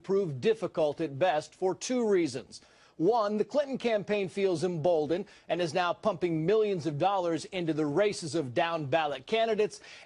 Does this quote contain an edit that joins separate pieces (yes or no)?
no